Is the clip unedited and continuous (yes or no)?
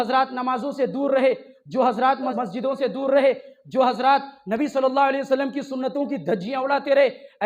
no